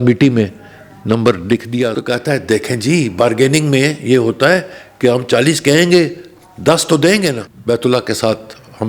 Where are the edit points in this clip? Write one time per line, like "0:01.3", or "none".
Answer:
0:01.9
0:07.5